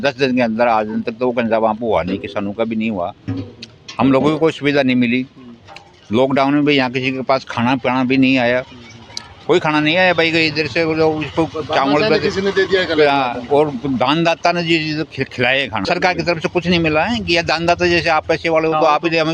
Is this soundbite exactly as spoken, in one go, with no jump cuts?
yes; 0 cuts

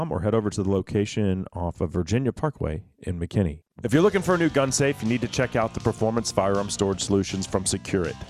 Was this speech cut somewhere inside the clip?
yes; 1 cut; at 3.7 s

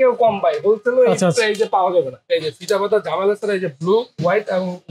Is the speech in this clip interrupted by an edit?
yes; 1 cut; at 2.2 s

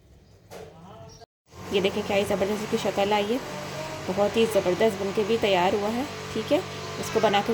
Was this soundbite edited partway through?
yes; 1 cut; at 1.4 s

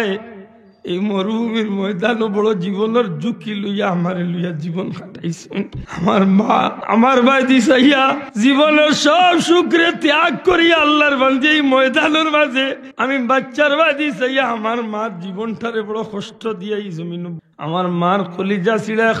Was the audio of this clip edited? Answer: yes; 5 cuts; at 5.8 s, 6.8 s, 8.2 s, 12.9 s, 17.4 s

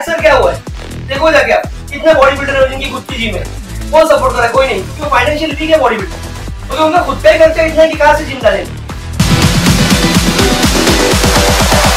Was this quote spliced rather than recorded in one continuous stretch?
no; 0 cuts

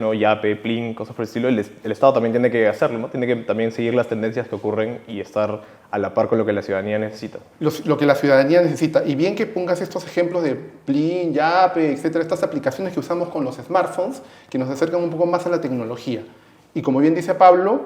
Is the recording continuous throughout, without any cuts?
yes; 0 cuts

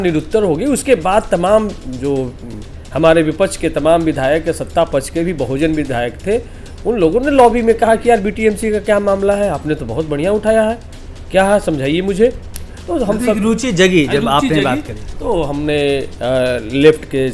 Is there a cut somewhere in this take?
no; 0 cuts

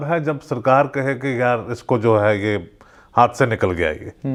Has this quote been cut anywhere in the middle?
no; 0 cuts

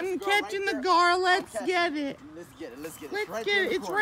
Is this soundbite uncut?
yes; 0 cuts

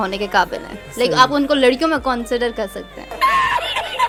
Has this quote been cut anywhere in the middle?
no; 0 cuts

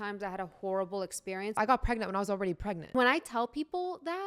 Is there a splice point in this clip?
yes; 2 cuts; at 1.6 s, 2.9 s

